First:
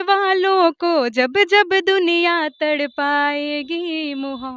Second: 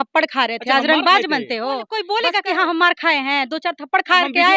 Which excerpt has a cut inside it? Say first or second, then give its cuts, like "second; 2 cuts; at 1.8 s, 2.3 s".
second; 1 cut; at 1.9 s